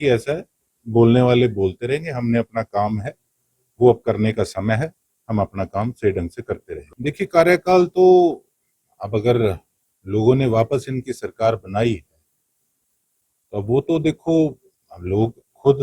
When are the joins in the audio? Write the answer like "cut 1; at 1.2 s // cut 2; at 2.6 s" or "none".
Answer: none